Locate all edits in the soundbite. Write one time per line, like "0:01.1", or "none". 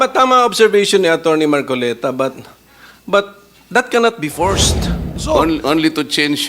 0:05.2

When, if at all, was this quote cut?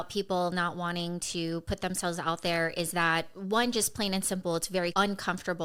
none

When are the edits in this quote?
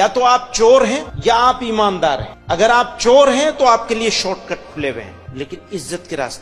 0:01.1
0:02.3
0:05.2

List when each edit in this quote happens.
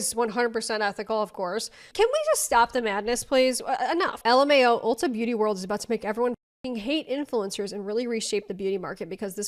none

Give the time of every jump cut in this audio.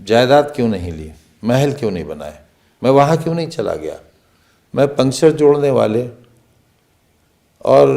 none

